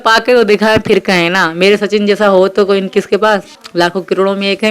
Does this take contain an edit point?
yes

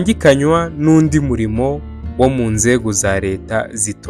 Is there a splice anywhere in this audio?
no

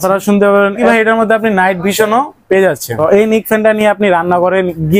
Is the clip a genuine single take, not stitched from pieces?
no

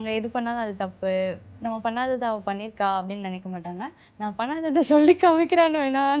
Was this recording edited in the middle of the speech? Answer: yes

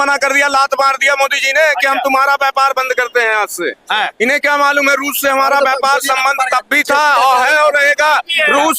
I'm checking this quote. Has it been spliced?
no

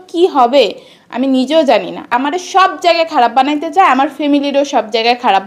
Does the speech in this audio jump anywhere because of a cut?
yes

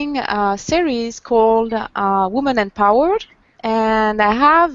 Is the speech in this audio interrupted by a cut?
no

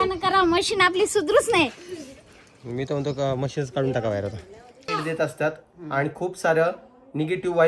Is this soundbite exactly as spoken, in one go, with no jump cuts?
no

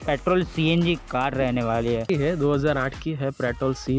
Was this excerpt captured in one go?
no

